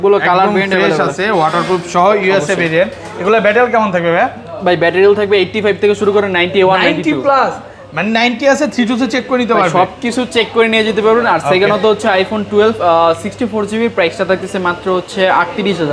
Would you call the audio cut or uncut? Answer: uncut